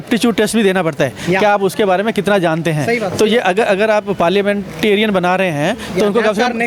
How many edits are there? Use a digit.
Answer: 0